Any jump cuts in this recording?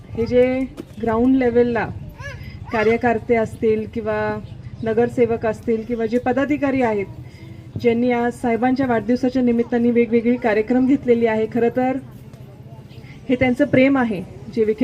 no; 0 cuts

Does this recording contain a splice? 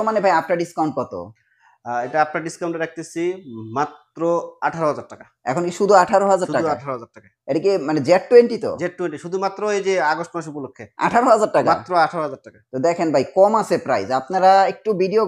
no; 0 cuts

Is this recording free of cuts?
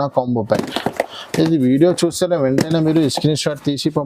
yes; 0 cuts

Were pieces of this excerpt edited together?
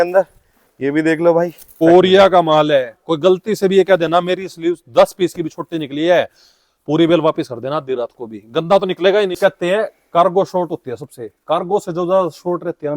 yes; 2 cuts; at 1.8 s, 9.4 s

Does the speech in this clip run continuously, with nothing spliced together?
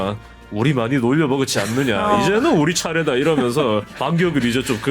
no; 1 cut; at 3.9 s

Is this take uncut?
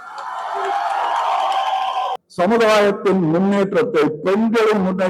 no; 1 cut; at 2.2 s

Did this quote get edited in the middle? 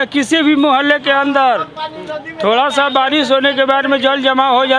no; 0 cuts

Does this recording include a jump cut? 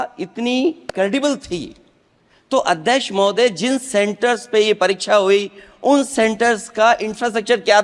no; 0 cuts

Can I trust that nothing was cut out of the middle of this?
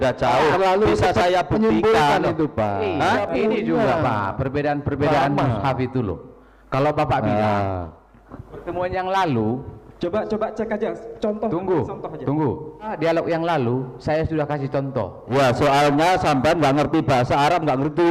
no; 3 cuts; at 3.2 s, 12.9 s, 15.2 s

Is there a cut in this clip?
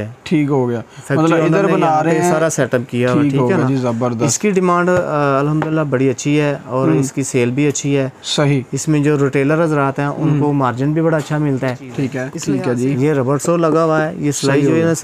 yes; 1 cut; at 12.3 s

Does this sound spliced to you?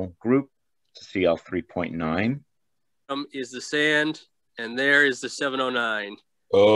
yes; 1 cut; at 3.1 s

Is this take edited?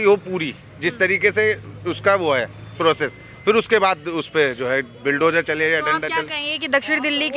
no; 0 cuts

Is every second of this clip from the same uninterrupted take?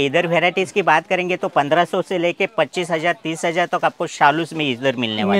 yes; 0 cuts

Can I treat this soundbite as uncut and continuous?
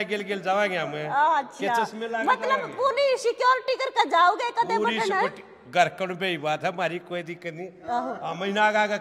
yes; 0 cuts

